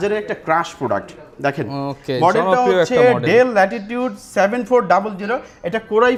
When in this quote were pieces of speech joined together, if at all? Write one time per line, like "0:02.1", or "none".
none